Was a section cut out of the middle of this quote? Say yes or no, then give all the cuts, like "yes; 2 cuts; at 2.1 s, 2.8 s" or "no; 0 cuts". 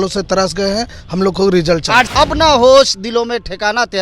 yes; 1 cut; at 2.1 s